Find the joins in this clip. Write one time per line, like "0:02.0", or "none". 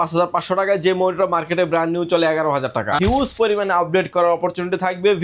0:03.0